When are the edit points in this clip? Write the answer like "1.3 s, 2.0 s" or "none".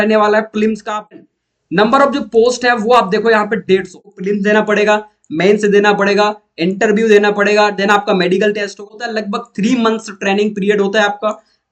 1.1 s, 4.1 s, 9.0 s